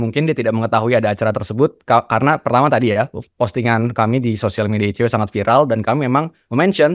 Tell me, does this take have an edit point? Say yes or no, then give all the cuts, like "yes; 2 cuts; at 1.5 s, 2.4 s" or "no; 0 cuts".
no; 0 cuts